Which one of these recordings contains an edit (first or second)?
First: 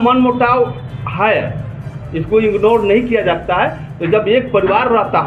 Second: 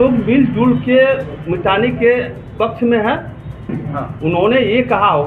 second